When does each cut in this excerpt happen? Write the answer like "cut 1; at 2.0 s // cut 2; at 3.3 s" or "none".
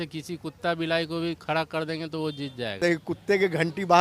cut 1; at 2.8 s

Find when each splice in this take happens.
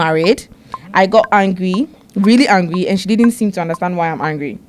none

